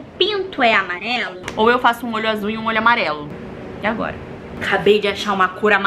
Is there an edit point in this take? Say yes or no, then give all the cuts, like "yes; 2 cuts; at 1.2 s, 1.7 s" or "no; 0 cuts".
yes; 2 cuts; at 1.4 s, 4.5 s